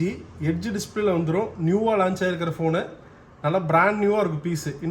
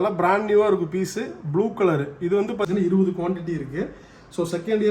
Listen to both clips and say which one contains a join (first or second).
second